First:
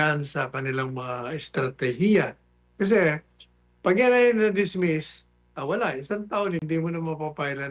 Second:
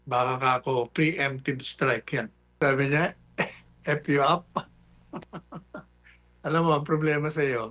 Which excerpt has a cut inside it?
second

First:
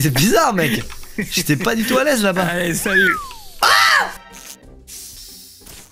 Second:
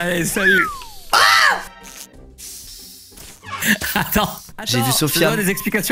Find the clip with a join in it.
first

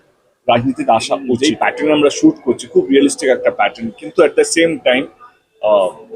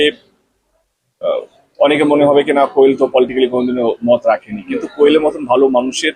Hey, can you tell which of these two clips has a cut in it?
first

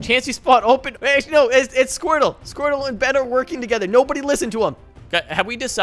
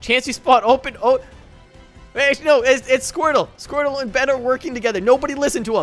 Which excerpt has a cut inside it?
first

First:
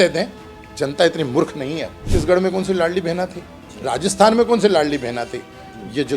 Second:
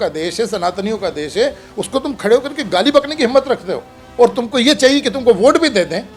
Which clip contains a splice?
first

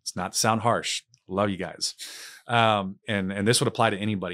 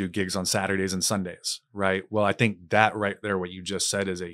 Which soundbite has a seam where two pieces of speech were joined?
first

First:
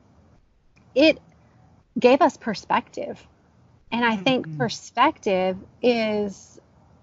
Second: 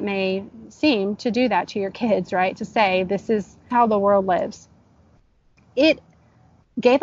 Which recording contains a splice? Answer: second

